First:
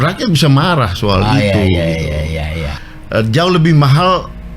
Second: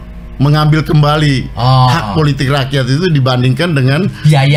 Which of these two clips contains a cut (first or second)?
first